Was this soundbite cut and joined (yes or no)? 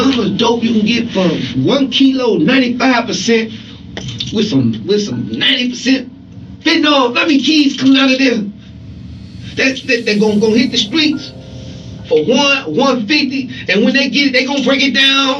no